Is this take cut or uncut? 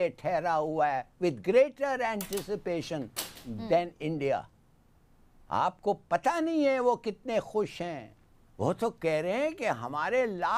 uncut